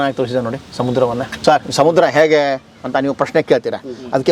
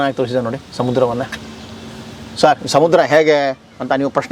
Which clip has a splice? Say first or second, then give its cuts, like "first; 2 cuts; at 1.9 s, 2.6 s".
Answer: first; 1 cut; at 1.3 s